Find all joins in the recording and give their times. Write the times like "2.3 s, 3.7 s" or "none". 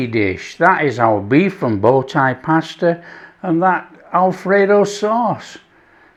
none